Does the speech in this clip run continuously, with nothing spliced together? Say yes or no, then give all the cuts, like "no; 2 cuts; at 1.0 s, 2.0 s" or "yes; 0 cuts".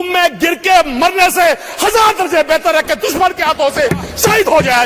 yes; 0 cuts